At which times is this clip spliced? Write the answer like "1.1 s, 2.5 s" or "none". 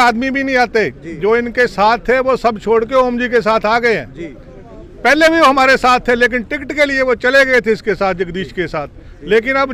none